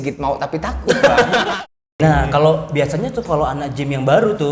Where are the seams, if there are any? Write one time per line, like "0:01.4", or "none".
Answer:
0:01.5

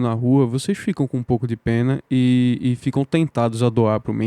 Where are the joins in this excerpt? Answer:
none

